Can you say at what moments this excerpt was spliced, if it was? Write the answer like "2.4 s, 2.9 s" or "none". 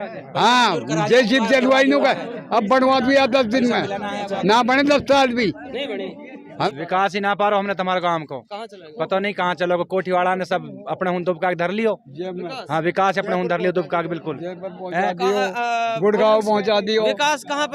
6.7 s